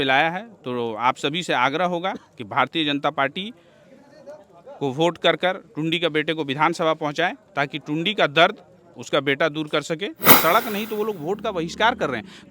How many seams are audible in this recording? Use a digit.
1